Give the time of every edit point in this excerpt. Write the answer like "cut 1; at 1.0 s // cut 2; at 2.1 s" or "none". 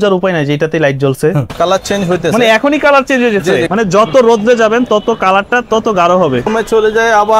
cut 1; at 1.5 s // cut 2; at 3.7 s // cut 3; at 6.5 s

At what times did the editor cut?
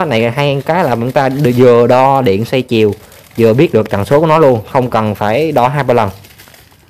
none

